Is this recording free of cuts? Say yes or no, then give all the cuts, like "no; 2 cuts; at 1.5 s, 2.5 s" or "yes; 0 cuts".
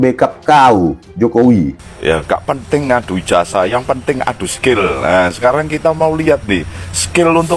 no; 1 cut; at 1.7 s